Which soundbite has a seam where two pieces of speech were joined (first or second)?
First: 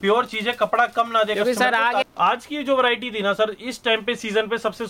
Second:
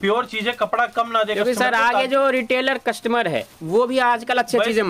first